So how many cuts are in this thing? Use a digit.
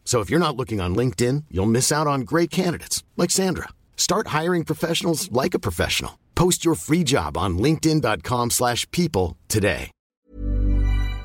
1